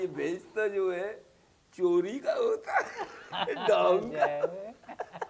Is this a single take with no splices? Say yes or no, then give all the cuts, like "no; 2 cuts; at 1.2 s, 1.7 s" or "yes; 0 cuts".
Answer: yes; 0 cuts